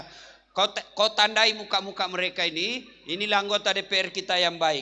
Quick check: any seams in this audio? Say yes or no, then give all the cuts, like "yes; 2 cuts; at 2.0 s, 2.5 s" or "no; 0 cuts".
no; 0 cuts